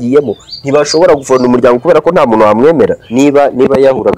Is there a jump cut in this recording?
yes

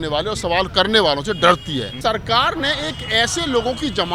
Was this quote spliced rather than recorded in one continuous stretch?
yes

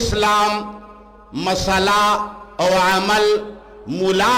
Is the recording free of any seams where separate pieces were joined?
yes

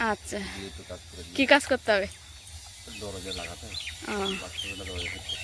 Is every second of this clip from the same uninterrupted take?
yes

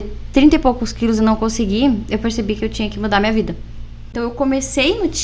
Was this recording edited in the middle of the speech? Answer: yes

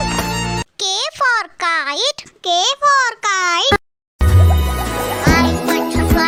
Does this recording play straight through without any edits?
yes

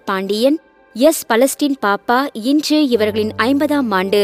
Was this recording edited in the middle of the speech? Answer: no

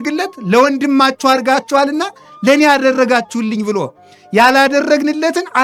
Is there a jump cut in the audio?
no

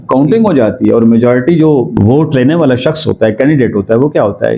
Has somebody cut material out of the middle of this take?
yes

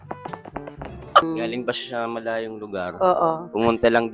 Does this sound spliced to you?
yes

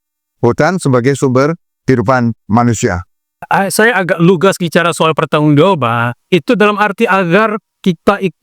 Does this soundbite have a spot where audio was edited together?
yes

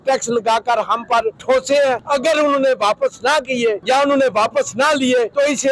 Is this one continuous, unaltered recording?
yes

